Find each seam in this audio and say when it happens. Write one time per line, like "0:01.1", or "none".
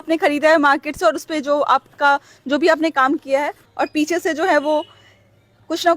0:03.7